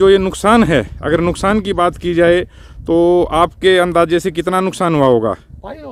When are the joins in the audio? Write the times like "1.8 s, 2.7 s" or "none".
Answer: none